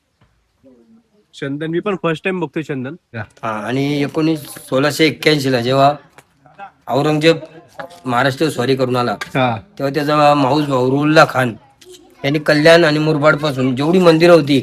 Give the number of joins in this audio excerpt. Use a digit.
1